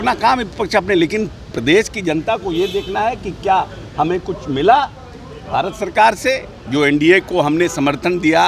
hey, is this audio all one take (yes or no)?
yes